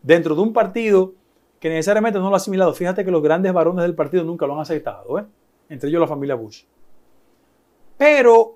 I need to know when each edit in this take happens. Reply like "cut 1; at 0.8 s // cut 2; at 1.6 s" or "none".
none